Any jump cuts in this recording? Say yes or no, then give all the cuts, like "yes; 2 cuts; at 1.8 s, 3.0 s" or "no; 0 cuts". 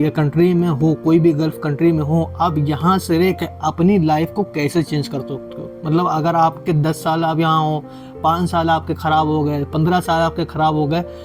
no; 0 cuts